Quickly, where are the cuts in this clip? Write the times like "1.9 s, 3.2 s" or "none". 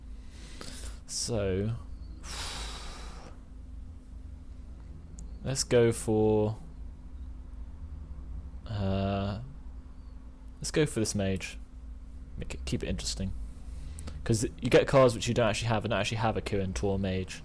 5.5 s